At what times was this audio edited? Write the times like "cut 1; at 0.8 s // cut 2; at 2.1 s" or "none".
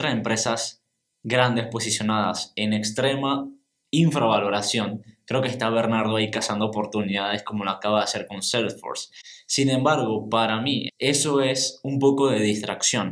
cut 1; at 10.9 s